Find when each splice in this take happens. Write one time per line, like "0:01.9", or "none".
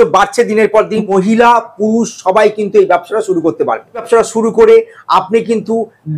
0:01.0
0:04.0